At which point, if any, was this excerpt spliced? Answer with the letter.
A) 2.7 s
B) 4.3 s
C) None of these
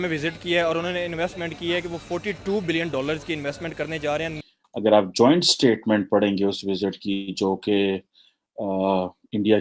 B